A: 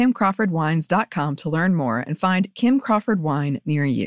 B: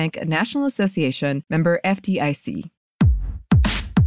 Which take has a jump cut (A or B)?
B